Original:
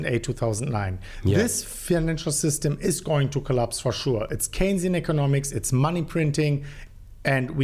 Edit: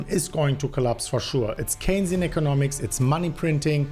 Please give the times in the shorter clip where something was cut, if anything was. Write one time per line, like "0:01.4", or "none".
none